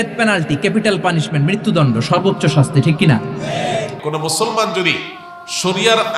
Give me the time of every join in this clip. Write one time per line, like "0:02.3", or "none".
0:04.0

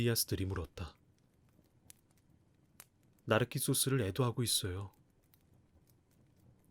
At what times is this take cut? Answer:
0:01.0
0:02.9

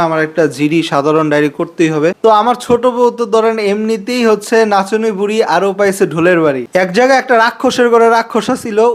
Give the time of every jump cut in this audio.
0:02.2
0:06.6

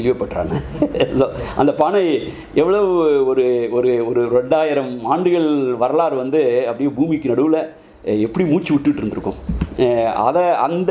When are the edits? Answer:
none

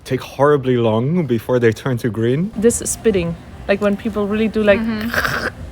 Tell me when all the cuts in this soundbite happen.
0:02.5

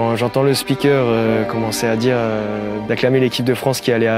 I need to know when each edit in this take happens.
0:02.8

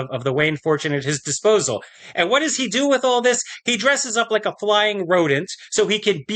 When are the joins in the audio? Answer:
0:02.0

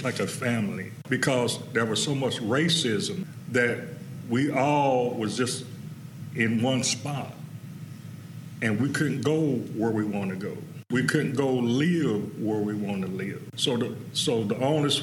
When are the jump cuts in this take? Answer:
0:01.0
0:03.3
0:10.8
0:13.5

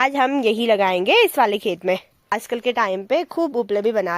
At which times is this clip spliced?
0:02.4

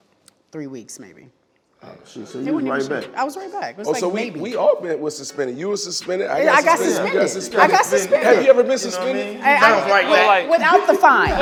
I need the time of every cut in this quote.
none

